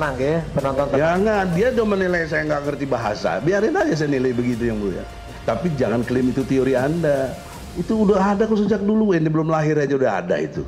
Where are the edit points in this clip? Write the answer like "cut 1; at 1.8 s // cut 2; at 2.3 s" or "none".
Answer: cut 1; at 5.3 s